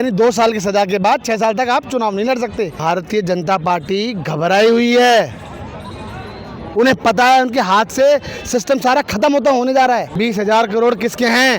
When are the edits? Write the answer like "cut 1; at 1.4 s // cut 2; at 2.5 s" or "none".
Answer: cut 1; at 2.8 s // cut 2; at 10.1 s

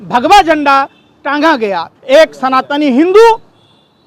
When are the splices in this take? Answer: cut 1; at 1.9 s

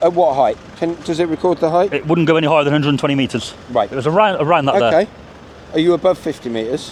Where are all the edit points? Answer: none

